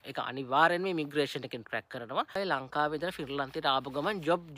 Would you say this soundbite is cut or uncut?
cut